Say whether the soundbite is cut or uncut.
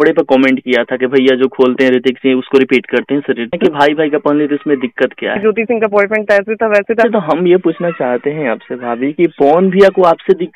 cut